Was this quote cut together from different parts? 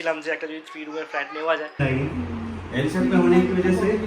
yes; 1 cut; at 1.8 s

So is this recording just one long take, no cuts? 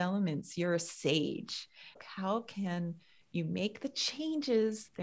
no; 1 cut; at 2.0 s

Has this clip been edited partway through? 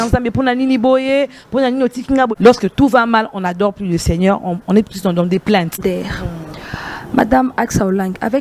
yes; 2 cuts; at 2.3 s, 5.8 s

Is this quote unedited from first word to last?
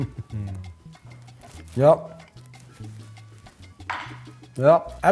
yes; 0 cuts

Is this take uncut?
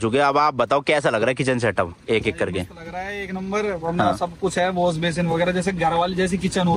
yes; 0 cuts

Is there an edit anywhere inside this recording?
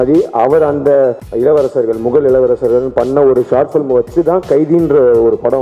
yes; 1 cut; at 1.2 s

